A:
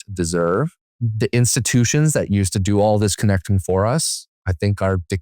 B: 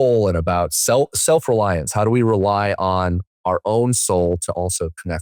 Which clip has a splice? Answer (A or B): A